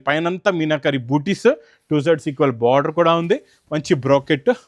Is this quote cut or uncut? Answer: uncut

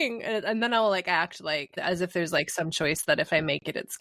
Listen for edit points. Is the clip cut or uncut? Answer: uncut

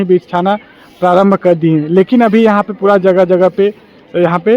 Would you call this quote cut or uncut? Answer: uncut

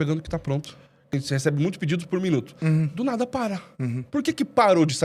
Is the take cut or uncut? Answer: cut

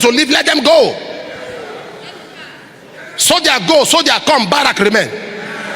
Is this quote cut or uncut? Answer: uncut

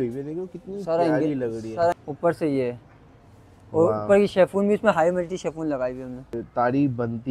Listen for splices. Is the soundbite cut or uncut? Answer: cut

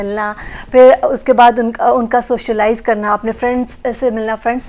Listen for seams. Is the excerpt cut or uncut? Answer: uncut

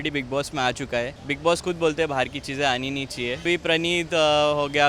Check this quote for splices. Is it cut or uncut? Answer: cut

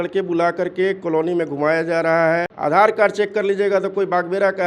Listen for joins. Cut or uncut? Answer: cut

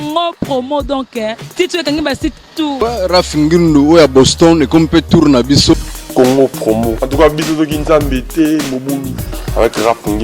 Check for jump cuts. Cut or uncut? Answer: cut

